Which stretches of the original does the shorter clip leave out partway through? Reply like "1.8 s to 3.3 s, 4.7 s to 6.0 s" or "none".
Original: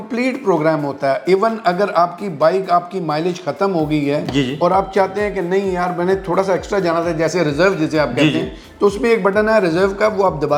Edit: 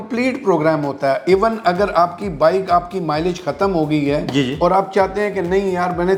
none

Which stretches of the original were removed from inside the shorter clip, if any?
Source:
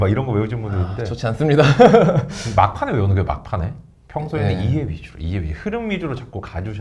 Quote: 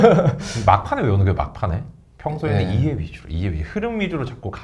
none

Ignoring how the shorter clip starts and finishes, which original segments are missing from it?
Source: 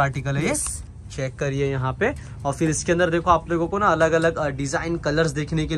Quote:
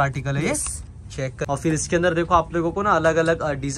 1.4 s to 2.4 s

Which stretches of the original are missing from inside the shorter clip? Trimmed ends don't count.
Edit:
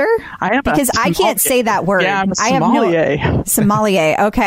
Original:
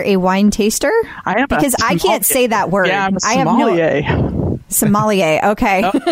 4.3 s to 4.7 s

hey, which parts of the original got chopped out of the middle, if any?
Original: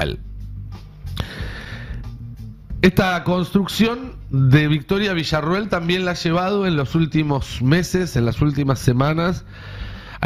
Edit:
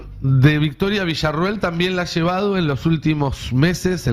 none

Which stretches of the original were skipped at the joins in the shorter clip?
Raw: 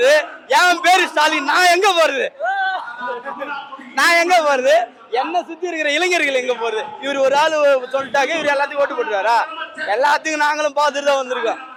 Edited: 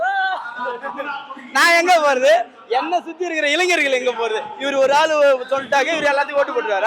none

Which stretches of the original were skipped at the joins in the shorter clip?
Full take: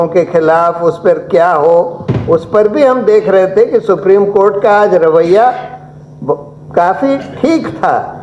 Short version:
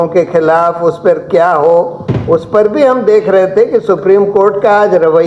none

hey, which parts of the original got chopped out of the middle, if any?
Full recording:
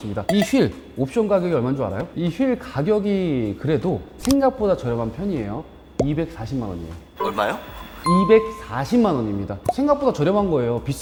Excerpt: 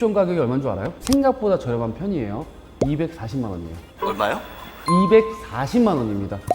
2.1 s to 4.1 s

